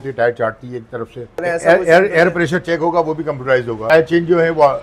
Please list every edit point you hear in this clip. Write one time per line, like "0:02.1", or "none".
0:01.4
0:03.9